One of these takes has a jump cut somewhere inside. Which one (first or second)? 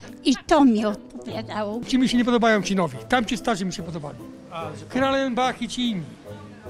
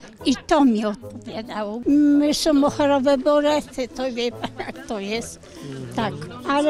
first